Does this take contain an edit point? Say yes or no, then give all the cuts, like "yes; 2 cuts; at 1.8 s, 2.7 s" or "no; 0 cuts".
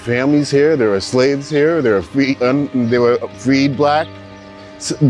no; 0 cuts